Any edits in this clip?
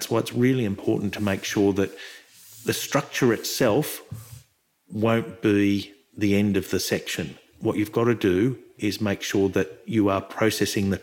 no; 0 cuts

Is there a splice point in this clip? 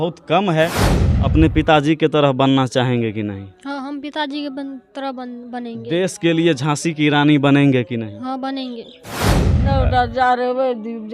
yes; 2 cuts; at 1.0 s, 9.4 s

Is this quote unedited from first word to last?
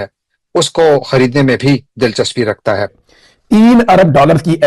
no; 1 cut; at 2.9 s

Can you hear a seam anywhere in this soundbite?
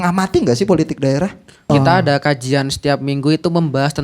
yes; 1 cut; at 1.7 s

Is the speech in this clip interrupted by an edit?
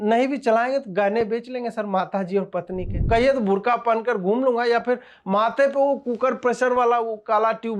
yes; 1 cut; at 3.0 s

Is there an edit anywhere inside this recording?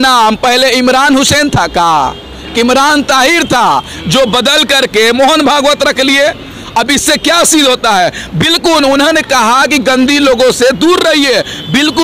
no; 0 cuts

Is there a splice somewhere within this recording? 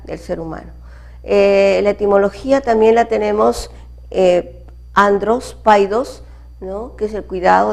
yes; 1 cut; at 3.8 s

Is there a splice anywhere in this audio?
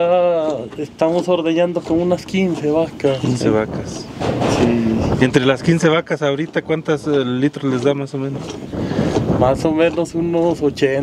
no; 0 cuts

